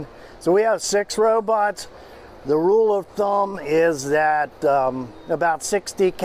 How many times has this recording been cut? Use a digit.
0